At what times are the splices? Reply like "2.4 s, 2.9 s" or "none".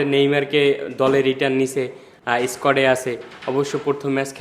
none